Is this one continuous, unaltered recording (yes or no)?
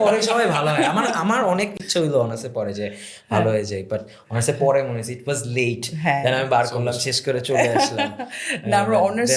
yes